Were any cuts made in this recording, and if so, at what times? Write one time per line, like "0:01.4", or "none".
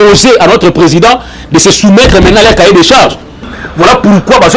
0:03.6